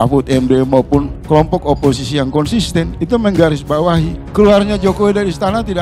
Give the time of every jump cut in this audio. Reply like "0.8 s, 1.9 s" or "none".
1.2 s